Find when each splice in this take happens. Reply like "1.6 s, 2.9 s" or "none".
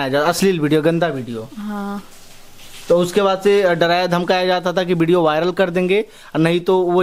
none